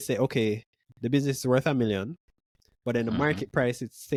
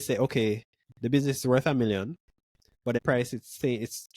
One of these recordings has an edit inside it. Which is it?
second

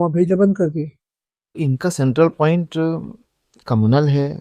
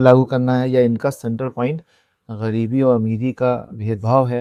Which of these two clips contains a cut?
first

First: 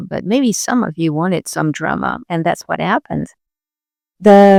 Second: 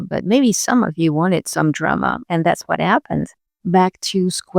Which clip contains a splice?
second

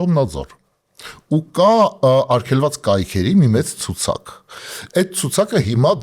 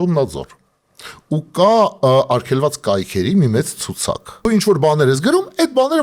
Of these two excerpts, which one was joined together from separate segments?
second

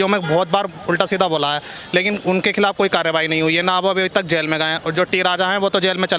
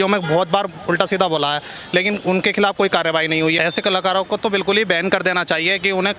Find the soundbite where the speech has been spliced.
second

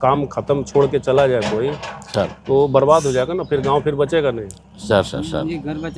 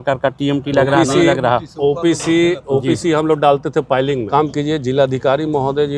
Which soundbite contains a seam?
second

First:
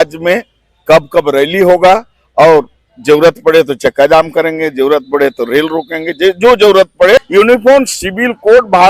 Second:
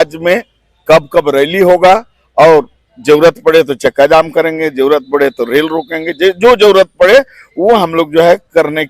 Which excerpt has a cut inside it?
first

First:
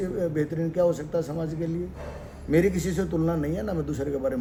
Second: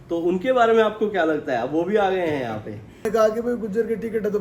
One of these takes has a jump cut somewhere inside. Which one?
second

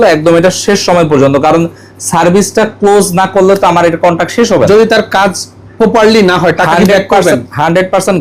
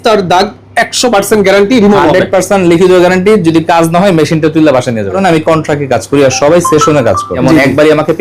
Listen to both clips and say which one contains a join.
second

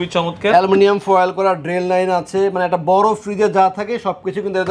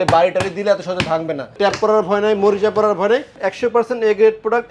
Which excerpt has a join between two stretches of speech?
second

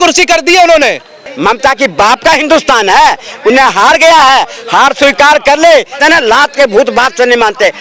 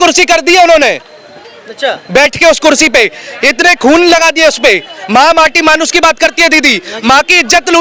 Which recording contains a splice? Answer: first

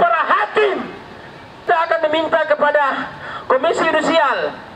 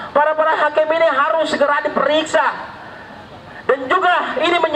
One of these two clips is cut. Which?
first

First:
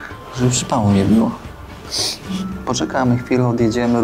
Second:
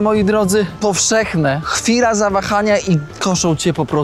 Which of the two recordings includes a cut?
second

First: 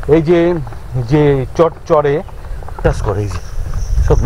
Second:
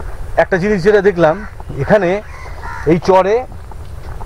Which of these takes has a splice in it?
first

